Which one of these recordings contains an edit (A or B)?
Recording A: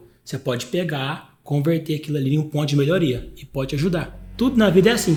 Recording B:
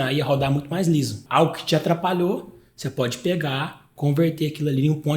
B